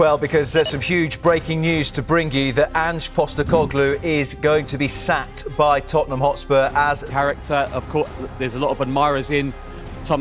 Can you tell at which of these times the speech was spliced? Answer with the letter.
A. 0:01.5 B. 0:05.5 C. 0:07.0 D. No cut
C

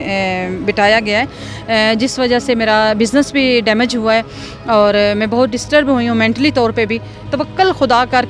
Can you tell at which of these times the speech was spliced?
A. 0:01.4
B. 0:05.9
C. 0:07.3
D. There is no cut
C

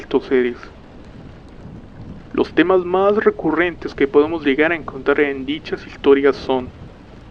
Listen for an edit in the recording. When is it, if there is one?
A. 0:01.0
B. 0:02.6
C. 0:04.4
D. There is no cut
D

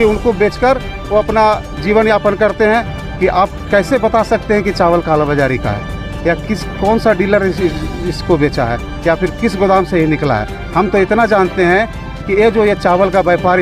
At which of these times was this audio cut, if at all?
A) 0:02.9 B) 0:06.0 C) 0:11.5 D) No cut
A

